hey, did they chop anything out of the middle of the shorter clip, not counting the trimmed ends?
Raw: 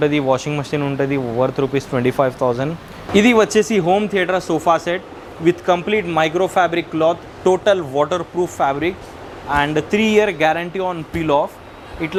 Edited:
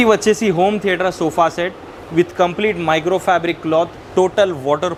no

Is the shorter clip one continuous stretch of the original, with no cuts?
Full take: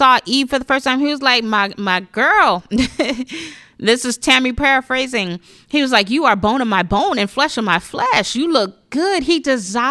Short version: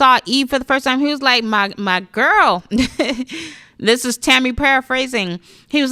yes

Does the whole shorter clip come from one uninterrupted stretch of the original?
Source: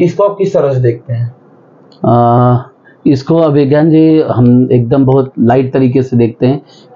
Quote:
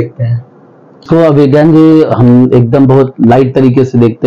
no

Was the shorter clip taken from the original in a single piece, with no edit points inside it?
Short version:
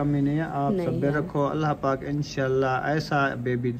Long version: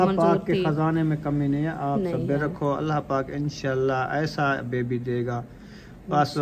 yes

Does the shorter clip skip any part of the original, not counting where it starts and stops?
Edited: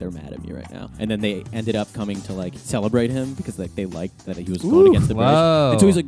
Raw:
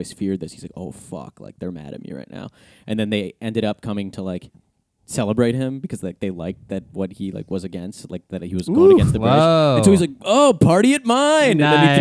yes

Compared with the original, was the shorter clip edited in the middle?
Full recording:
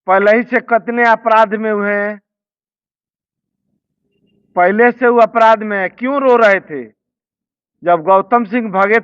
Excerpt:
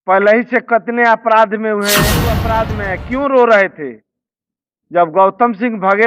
yes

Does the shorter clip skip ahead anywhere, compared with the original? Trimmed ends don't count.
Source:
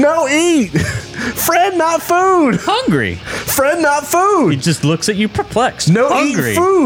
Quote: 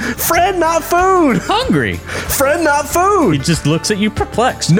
no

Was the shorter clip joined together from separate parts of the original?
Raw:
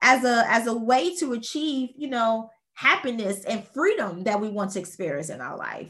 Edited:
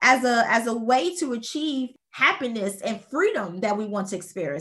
yes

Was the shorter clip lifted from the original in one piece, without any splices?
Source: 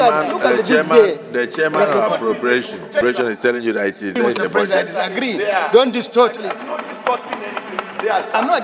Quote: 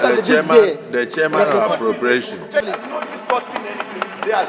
no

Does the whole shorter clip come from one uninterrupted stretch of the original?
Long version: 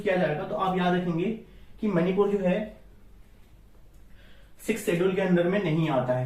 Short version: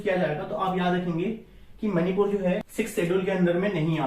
no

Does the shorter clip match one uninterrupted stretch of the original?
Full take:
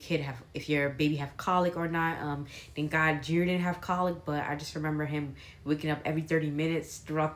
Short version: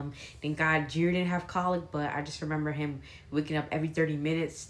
yes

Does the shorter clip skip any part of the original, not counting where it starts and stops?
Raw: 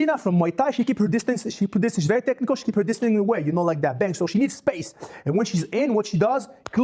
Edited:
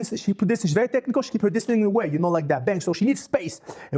no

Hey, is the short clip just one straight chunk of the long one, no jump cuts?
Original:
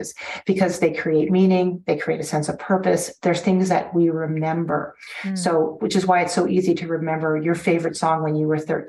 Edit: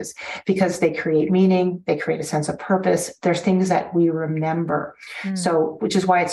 yes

